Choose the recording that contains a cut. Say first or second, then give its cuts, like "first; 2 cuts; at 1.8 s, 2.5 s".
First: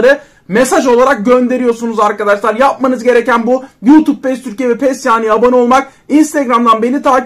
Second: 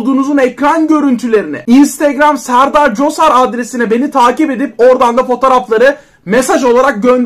second; 1 cut; at 1.5 s